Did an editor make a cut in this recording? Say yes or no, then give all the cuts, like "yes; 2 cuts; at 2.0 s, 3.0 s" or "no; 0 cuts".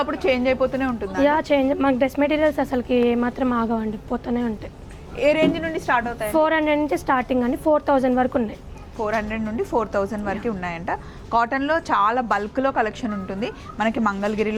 no; 0 cuts